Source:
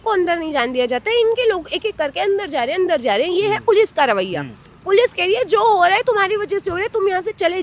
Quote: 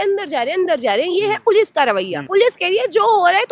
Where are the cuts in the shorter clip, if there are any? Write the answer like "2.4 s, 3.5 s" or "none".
2.1 s